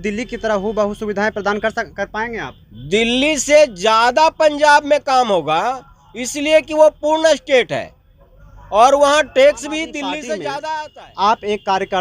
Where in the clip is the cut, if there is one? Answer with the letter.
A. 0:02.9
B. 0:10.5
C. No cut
B